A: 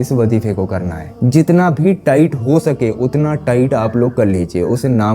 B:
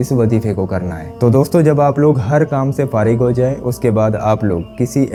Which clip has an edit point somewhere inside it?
A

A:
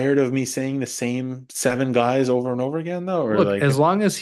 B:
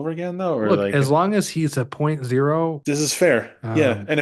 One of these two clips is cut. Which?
B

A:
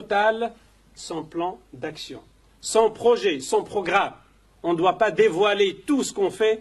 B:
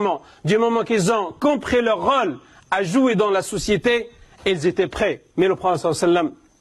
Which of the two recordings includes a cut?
B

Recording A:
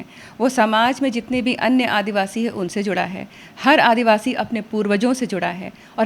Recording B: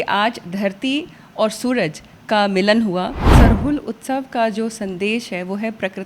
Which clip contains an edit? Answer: B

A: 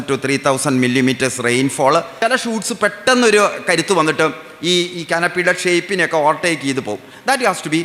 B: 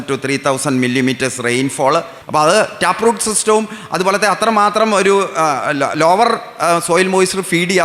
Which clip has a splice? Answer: B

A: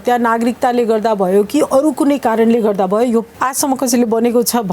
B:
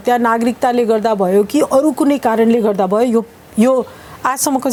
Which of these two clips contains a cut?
A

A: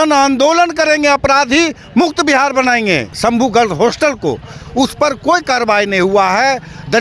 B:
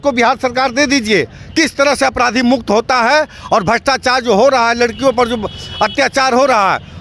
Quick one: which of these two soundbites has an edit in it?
A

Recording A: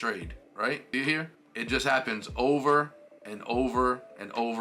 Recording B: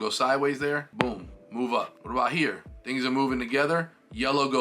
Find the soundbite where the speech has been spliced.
B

